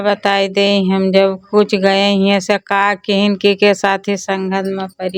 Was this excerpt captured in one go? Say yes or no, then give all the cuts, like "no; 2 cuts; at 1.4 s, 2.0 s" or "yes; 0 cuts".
yes; 0 cuts